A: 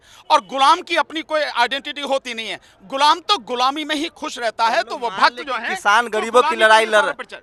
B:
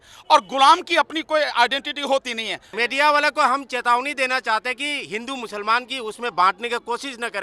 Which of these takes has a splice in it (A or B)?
B